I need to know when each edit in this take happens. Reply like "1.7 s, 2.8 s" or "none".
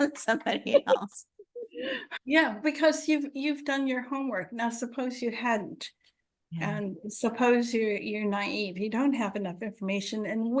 2.0 s